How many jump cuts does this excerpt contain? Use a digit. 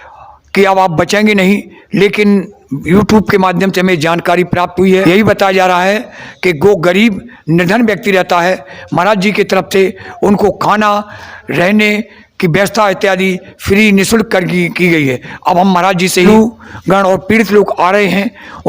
2